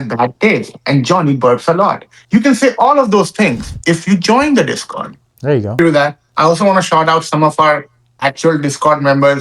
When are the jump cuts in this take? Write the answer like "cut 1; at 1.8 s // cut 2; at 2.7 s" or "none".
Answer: cut 1; at 5.8 s